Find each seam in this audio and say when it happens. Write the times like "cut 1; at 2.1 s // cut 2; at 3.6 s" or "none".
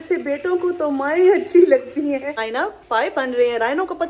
cut 1; at 2.4 s